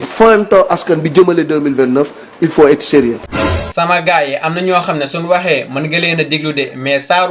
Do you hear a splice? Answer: yes; 1 cut; at 3.2 s

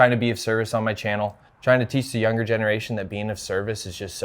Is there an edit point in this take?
yes; 1 cut; at 1.5 s

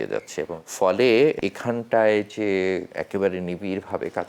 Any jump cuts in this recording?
yes; 2 cuts; at 1.4 s, 2.9 s

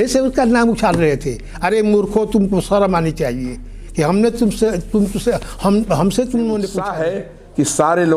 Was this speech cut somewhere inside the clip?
yes; 1 cut; at 6.9 s

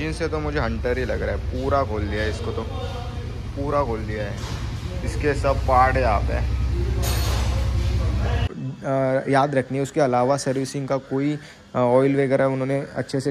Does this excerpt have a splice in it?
yes; 1 cut; at 8.5 s

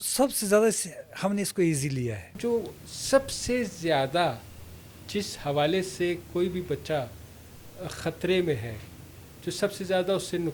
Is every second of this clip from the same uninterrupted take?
no; 1 cut; at 2.4 s

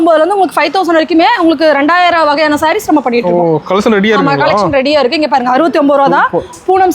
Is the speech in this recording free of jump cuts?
yes; 0 cuts

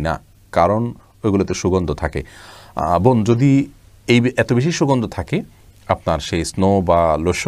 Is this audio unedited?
yes; 0 cuts

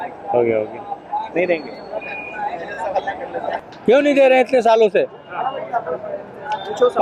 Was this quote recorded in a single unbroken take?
no; 1 cut; at 3.5 s

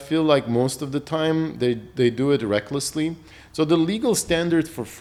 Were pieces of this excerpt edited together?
no; 0 cuts

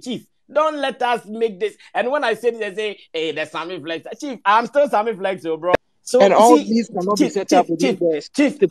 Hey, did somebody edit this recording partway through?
yes; 1 cut; at 5.8 s

